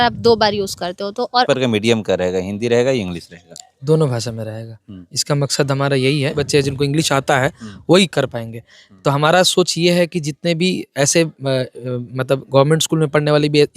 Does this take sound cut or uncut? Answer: cut